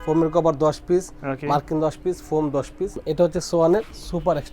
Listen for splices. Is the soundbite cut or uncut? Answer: cut